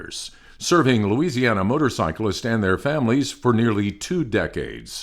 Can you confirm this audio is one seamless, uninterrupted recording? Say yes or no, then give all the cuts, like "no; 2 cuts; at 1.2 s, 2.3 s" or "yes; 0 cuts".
yes; 0 cuts